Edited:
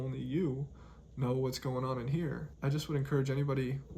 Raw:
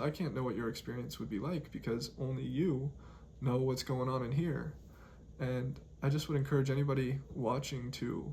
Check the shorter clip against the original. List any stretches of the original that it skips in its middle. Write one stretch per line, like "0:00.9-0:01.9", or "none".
0:04.7-0:05.9